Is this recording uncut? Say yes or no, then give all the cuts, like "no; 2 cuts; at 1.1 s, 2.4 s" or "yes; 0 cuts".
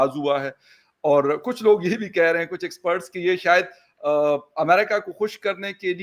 yes; 0 cuts